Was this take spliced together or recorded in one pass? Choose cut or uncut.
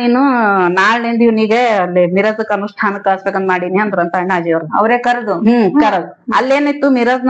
uncut